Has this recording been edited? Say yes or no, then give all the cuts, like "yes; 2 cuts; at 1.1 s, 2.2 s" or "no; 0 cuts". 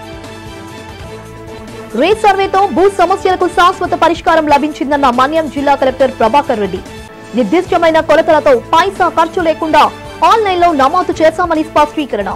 yes; 1 cut; at 1.0 s